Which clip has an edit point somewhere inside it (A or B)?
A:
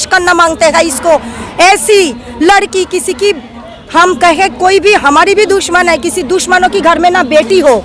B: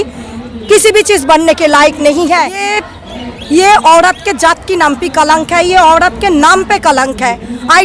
B